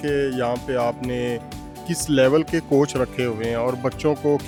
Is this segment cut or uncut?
uncut